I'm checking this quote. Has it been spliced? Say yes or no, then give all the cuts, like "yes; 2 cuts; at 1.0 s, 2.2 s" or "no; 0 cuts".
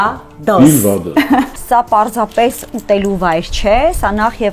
yes; 1 cut; at 1.6 s